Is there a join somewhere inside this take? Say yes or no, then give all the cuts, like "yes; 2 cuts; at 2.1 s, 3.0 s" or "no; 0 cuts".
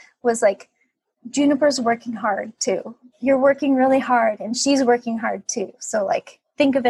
yes; 1 cut; at 3.0 s